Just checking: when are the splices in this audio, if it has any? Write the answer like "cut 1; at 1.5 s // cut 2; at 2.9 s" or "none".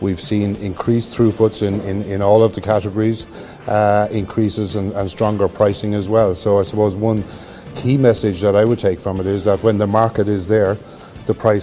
none